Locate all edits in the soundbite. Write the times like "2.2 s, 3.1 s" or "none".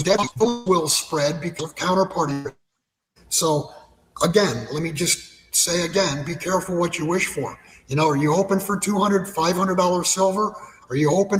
none